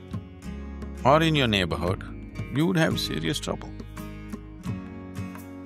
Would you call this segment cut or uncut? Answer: cut